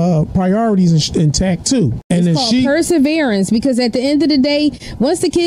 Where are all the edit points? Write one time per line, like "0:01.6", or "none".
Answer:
0:02.0